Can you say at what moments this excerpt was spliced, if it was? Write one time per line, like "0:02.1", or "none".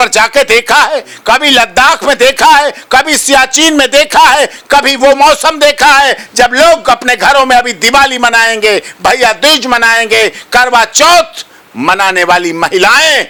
none